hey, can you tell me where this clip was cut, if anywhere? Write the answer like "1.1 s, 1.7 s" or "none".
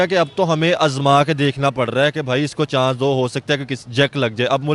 none